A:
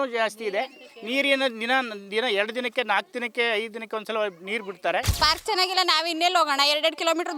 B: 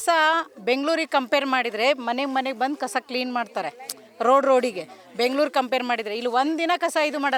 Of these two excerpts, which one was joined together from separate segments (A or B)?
A